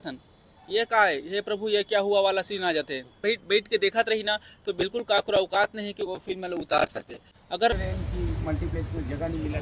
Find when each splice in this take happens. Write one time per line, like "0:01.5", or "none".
0:03.2
0:07.7